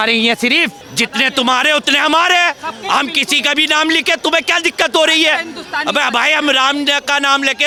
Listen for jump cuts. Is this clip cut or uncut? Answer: uncut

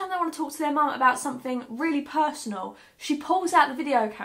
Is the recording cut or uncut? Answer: uncut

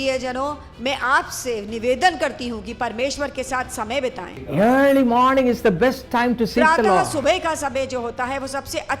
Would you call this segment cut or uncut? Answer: cut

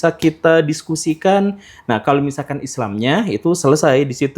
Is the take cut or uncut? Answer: uncut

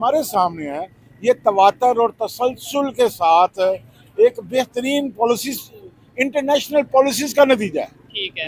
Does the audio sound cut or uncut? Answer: uncut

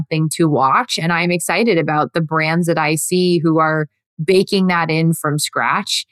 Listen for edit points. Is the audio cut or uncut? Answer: uncut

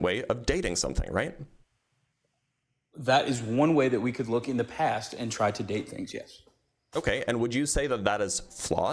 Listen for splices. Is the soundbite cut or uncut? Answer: uncut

